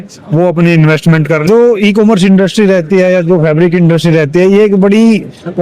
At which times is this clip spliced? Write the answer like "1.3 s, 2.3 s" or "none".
1.4 s

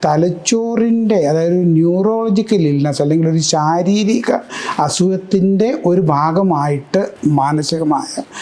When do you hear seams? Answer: 7.1 s

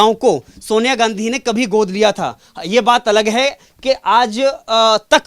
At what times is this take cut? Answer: none

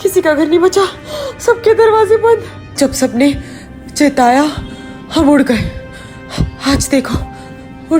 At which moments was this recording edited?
2.6 s

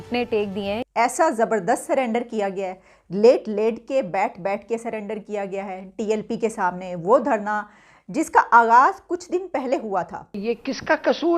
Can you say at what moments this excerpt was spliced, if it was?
0.9 s, 10.4 s

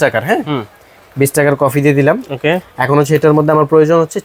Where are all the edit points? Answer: none

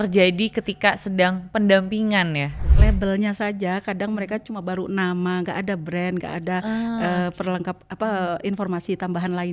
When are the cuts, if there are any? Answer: 2.6 s

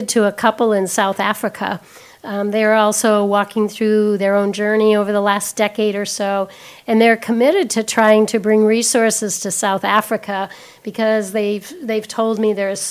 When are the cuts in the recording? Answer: none

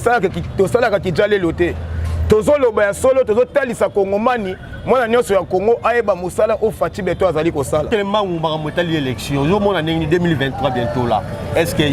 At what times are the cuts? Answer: 7.9 s

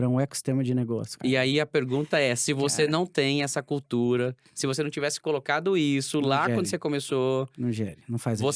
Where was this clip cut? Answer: 1.1 s

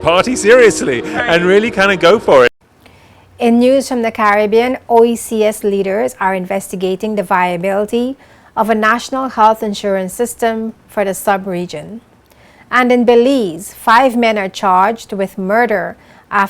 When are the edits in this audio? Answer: 2.5 s

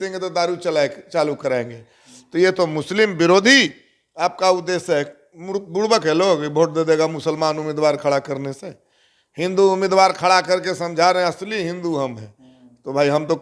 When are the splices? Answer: none

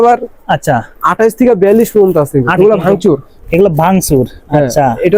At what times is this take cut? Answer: 2.6 s

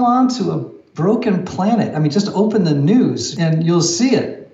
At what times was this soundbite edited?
3.3 s

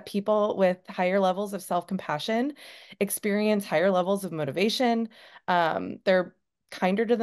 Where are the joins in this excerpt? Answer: none

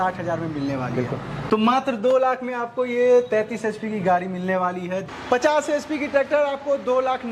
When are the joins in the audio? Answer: 1.4 s, 5.1 s

